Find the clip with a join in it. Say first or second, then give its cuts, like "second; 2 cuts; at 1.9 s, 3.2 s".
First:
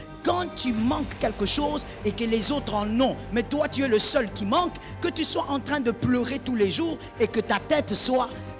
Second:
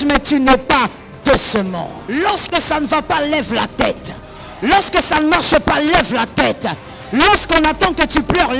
second; 1 cut; at 2.0 s